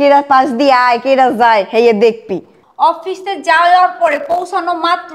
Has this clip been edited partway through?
yes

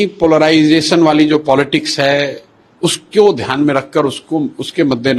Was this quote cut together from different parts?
no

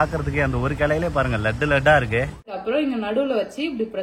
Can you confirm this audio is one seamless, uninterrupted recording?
no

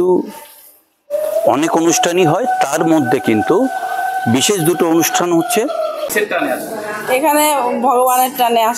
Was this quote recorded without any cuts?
no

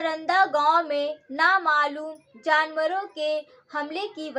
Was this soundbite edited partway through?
no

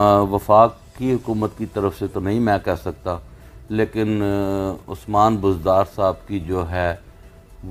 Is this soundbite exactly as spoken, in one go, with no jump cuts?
yes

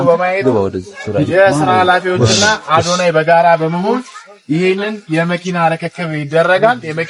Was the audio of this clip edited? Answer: no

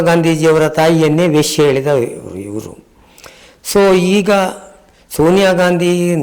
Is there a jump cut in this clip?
no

